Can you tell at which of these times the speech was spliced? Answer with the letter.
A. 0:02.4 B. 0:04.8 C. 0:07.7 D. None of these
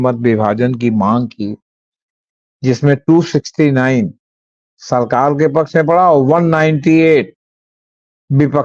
D